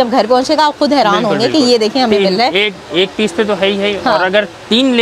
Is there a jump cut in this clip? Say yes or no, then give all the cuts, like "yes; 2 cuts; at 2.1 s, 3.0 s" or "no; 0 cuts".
no; 0 cuts